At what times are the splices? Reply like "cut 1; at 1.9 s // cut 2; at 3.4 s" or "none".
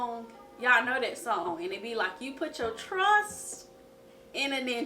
cut 1; at 1.5 s